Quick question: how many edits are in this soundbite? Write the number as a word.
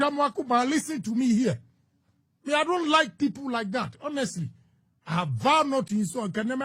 zero